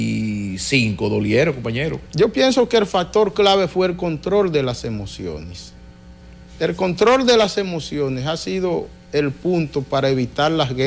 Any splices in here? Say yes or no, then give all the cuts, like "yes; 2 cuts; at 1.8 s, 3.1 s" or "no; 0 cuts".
no; 0 cuts